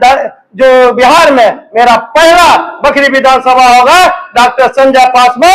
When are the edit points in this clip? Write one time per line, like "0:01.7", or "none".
none